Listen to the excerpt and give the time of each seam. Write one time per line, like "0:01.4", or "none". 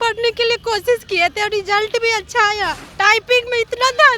0:02.8